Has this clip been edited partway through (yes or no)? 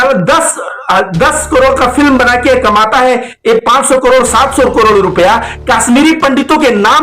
no